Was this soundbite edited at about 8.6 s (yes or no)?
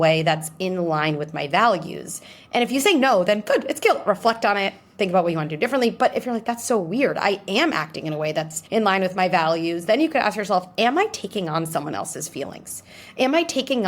yes